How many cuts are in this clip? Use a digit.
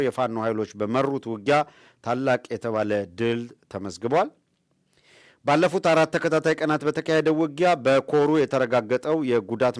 0